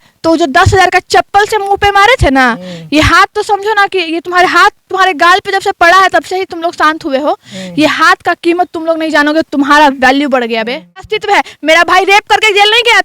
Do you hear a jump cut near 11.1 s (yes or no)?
yes